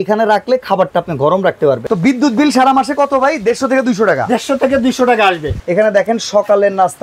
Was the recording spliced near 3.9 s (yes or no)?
no